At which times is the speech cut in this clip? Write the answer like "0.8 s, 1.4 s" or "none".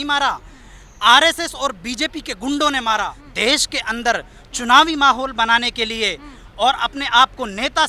3.2 s